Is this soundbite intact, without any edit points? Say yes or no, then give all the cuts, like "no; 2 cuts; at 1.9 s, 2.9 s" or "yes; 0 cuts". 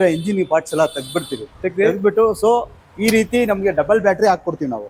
yes; 0 cuts